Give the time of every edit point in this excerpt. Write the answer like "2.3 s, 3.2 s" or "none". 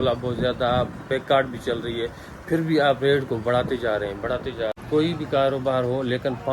4.8 s

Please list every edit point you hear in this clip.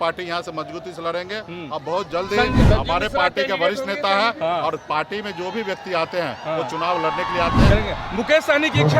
2.6 s, 7.7 s

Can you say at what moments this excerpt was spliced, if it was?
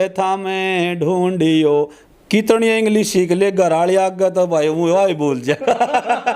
2.0 s

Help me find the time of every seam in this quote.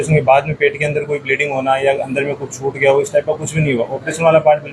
none

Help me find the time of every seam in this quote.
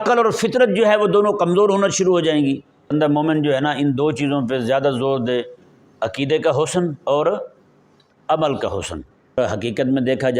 2.9 s, 9.4 s

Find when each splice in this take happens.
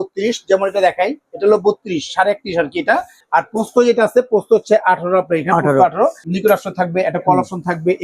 3.2 s, 6.3 s

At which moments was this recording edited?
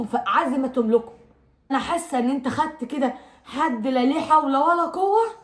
1.7 s

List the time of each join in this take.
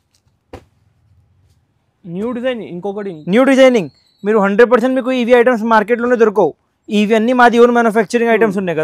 none

